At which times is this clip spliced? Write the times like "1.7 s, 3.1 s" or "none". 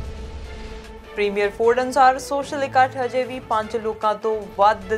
1.1 s